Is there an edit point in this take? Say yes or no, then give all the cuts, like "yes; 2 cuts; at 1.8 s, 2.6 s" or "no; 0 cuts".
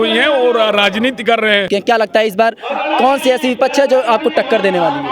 yes; 1 cut; at 1.7 s